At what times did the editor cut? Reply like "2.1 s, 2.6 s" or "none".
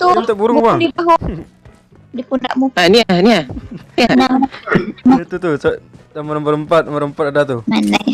none